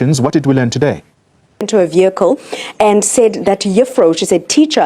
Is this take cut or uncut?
cut